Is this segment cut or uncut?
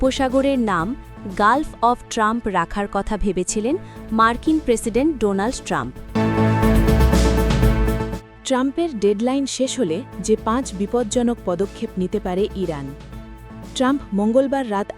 cut